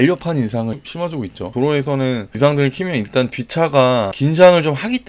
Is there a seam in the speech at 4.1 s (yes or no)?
yes